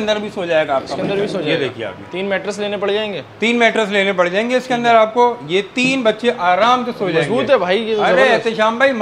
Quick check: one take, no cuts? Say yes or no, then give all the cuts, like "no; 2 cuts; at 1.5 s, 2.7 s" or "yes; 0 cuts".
yes; 0 cuts